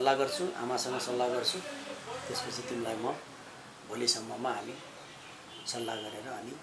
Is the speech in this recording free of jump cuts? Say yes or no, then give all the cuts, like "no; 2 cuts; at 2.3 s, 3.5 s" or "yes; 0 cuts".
yes; 0 cuts